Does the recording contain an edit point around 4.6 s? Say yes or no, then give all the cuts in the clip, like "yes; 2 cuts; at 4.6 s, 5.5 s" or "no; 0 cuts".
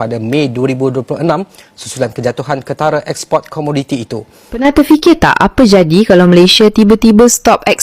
yes; 1 cut; at 4.6 s